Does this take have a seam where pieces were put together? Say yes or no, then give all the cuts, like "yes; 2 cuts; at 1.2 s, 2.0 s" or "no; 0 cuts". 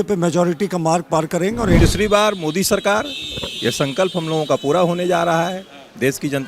yes; 1 cut; at 1.8 s